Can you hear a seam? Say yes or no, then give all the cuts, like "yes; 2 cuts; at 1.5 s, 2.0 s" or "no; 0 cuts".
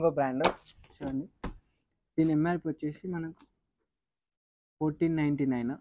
no; 0 cuts